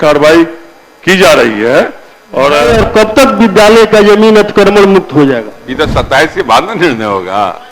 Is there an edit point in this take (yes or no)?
yes